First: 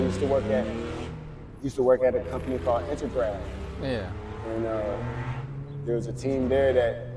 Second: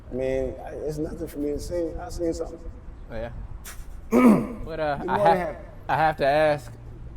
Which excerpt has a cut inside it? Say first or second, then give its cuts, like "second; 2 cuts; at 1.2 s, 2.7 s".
second; 1 cut; at 5.0 s